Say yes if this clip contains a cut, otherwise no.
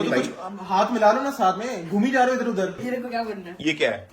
yes